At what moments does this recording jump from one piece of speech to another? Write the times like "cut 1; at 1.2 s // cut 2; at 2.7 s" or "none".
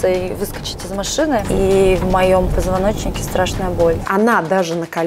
cut 1; at 1.4 s // cut 2; at 4.0 s